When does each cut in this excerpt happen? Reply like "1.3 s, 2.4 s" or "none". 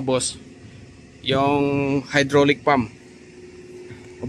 none